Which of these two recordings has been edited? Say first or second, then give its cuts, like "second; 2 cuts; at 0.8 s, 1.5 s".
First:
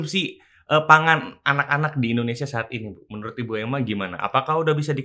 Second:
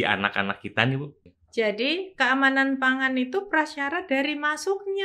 second; 1 cut; at 1.2 s